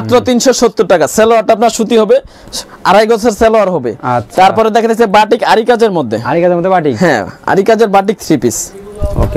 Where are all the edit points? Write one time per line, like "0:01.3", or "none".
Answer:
none